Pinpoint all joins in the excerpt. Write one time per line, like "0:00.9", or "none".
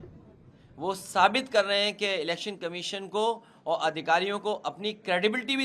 none